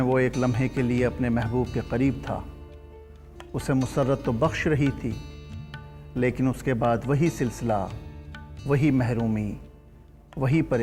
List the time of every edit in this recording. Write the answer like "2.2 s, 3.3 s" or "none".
none